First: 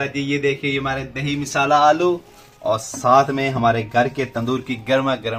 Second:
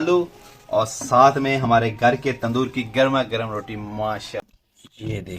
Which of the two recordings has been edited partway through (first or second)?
second